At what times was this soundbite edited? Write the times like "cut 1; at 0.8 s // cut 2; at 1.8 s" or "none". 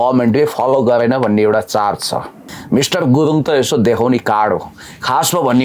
cut 1; at 2.5 s